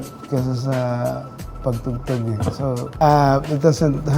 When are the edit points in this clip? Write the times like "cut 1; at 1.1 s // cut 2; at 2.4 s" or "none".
cut 1; at 2.8 s